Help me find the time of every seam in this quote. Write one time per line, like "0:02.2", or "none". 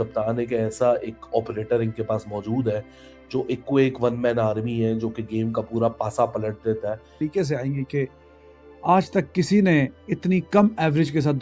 0:07.1